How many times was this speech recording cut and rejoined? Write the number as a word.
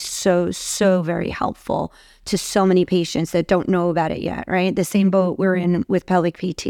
zero